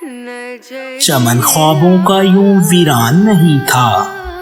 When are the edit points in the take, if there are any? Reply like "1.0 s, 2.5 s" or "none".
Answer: 1.1 s